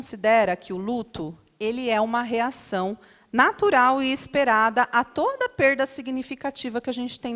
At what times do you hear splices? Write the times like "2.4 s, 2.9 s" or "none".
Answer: none

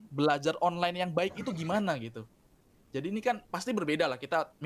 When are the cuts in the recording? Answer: none

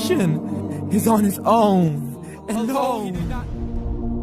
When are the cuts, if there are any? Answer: 3.1 s

